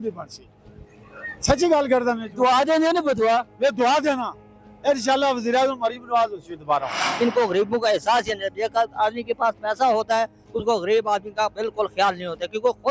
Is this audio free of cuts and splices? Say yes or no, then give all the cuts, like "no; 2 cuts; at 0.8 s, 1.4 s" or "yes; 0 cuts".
no; 1 cut; at 7.0 s